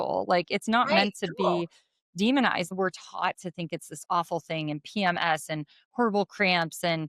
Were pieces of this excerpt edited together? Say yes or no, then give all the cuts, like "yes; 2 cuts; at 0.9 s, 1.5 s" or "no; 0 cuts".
yes; 1 cut; at 2.7 s